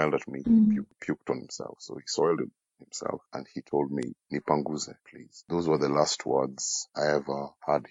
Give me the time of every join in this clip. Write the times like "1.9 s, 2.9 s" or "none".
none